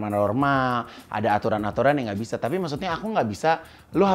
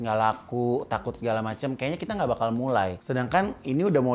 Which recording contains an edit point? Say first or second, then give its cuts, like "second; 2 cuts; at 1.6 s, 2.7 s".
second; 1 cut; at 3.0 s